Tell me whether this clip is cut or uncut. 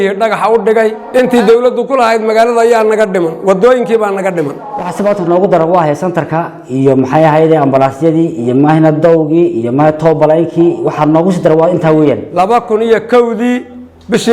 cut